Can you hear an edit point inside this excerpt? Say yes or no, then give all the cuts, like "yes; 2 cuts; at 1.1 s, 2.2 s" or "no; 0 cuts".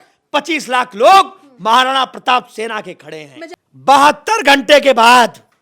yes; 1 cut; at 3.4 s